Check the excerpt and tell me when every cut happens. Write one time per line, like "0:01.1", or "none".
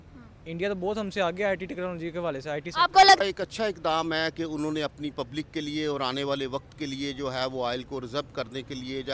0:03.2